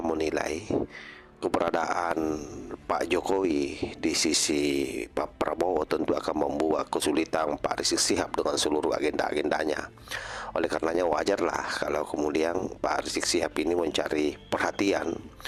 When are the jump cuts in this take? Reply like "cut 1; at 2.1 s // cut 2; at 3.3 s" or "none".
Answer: none